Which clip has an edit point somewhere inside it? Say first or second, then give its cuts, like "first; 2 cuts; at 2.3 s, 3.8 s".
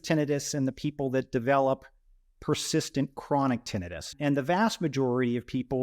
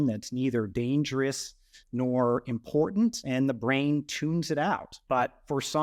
first; 1 cut; at 4.1 s